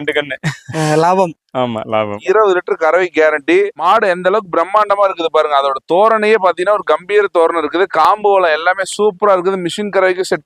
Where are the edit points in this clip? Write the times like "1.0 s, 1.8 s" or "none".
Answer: 2.2 s